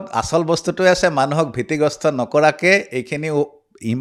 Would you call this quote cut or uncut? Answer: uncut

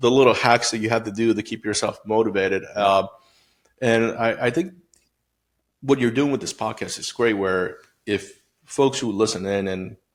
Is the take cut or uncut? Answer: uncut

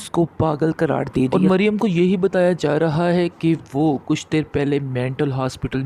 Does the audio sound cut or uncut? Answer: cut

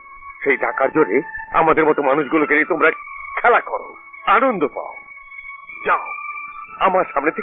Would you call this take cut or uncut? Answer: uncut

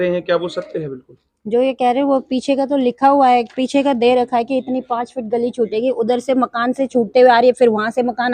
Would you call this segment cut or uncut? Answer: uncut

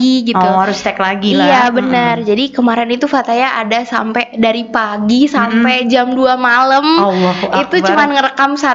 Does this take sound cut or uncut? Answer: uncut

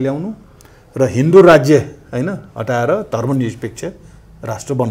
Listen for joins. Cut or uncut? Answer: uncut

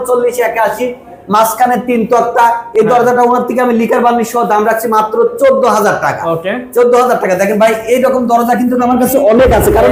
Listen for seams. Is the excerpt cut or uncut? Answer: uncut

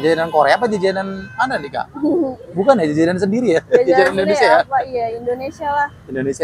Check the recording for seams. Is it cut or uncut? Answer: uncut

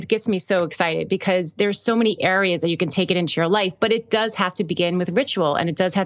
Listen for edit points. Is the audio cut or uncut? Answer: uncut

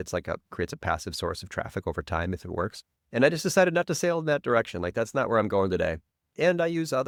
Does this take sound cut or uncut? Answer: uncut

